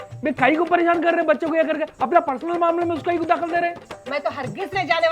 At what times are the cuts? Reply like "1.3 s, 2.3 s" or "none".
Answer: 4.0 s

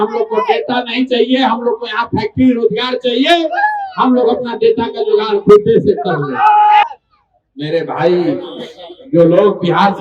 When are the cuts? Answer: 6.9 s

